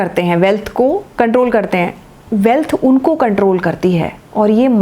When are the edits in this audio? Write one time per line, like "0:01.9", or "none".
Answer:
0:01.1